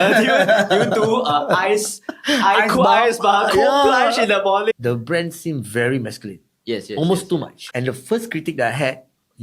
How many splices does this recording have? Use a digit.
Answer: 2